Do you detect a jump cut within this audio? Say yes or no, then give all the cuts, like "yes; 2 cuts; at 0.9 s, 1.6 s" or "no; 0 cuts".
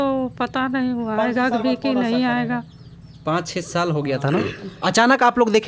no; 0 cuts